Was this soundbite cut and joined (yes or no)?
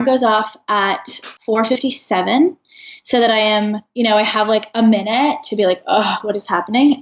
yes